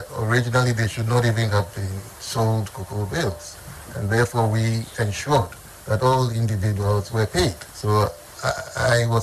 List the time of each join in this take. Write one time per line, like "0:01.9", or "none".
0:07.7
0:08.3